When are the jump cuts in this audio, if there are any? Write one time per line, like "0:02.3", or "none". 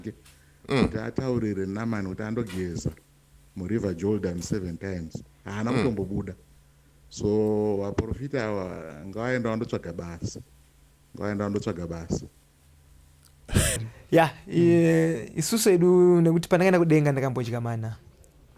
0:13.9